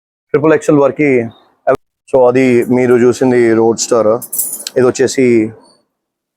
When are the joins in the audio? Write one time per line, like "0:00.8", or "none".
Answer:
0:01.7